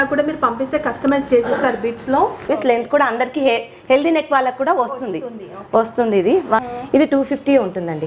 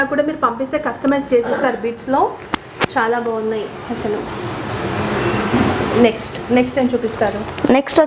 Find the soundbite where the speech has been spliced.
first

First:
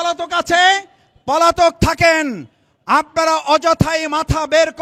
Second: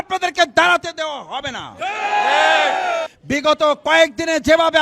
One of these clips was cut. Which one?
second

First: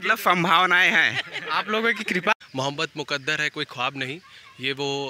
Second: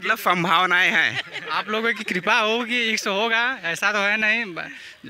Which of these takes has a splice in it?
first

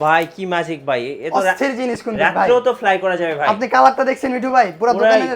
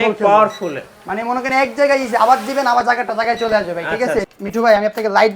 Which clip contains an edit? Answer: second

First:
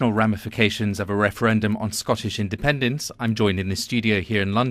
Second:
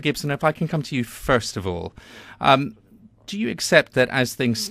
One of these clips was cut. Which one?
first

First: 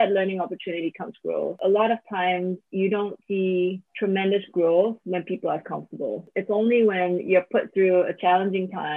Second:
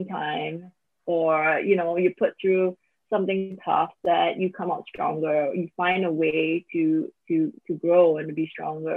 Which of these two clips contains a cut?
first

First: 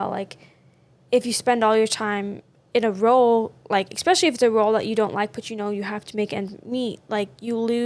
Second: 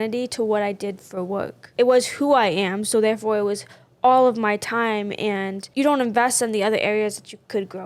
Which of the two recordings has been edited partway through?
second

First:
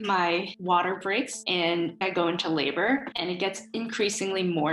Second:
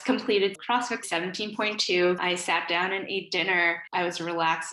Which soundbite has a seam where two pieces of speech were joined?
first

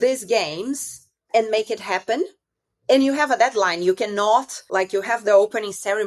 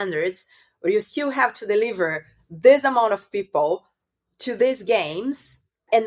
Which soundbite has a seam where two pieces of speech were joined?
first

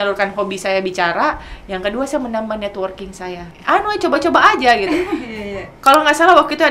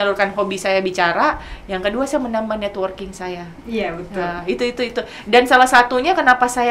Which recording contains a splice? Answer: first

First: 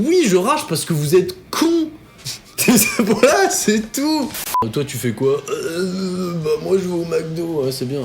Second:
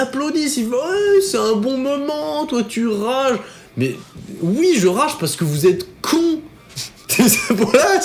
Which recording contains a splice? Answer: first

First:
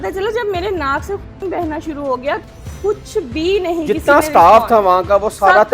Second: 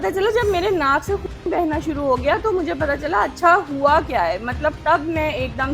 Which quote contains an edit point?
first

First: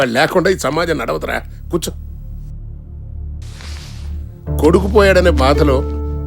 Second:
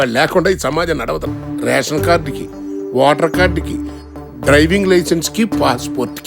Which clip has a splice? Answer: second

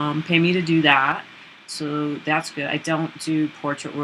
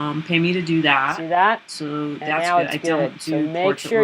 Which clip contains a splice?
first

